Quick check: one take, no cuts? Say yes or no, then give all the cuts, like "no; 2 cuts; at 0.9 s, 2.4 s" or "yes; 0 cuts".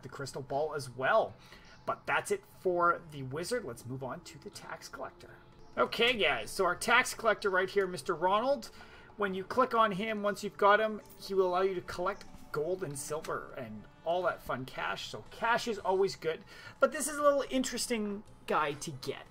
no; 1 cut; at 16.0 s